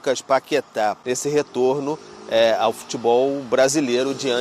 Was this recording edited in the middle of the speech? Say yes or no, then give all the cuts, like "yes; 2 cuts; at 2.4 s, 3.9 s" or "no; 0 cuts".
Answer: yes; 1 cut; at 1.0 s